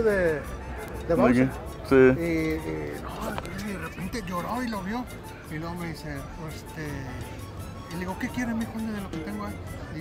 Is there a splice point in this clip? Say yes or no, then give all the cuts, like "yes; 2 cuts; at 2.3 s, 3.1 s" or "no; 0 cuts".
no; 0 cuts